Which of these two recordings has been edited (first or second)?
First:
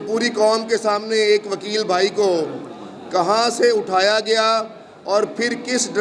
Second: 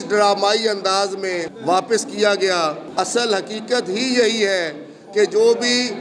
second